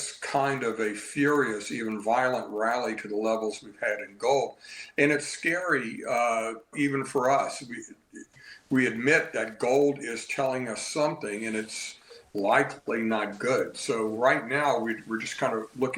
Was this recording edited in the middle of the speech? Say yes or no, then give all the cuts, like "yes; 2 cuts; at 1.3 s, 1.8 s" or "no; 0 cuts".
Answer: no; 0 cuts